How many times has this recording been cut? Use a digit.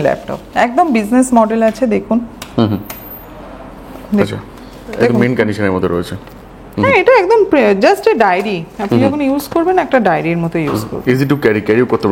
0